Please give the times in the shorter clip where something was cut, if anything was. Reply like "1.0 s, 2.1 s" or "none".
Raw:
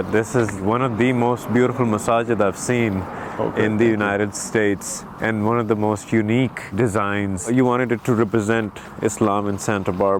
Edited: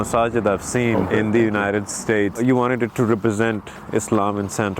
1.0 s, 2.3 s